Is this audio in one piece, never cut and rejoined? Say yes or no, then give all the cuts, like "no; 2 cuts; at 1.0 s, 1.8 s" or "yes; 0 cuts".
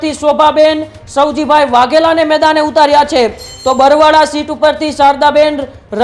yes; 0 cuts